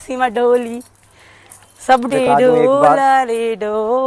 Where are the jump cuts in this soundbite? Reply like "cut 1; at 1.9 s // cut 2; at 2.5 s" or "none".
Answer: cut 1; at 2.1 s